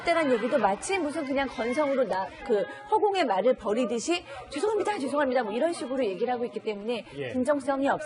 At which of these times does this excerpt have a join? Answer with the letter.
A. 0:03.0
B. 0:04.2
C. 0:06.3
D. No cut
D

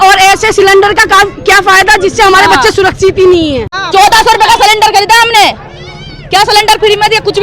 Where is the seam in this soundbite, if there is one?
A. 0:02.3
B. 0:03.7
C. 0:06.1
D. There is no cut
B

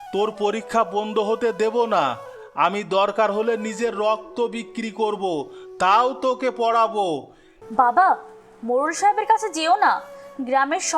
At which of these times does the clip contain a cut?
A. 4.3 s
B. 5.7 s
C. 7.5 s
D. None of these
C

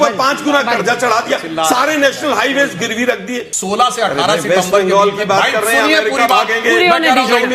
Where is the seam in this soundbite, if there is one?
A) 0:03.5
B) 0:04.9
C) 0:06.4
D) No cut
A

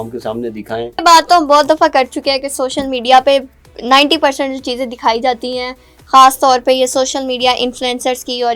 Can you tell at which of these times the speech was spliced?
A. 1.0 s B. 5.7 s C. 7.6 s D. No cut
A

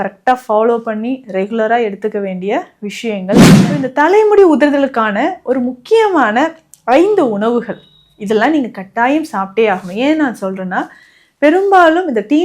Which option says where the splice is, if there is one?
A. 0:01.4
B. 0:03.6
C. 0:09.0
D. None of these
B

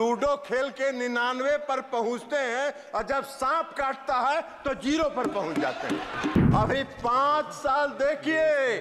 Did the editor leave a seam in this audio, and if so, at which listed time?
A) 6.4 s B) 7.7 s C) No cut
A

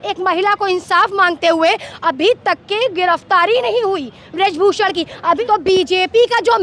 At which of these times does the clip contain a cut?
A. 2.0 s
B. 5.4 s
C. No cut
B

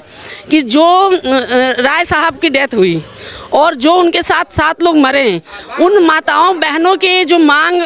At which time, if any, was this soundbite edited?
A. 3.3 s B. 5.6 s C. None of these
C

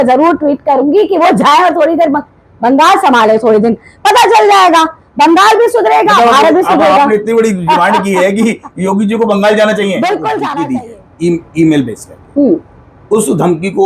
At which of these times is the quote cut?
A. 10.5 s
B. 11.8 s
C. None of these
A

